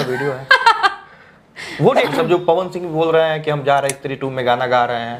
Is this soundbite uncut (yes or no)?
no